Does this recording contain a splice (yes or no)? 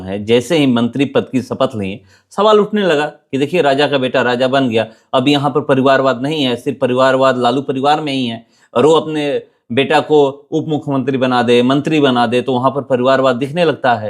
no